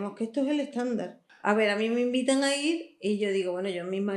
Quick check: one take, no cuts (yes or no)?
no